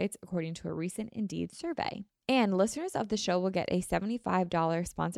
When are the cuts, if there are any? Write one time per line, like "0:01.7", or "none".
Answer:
0:02.1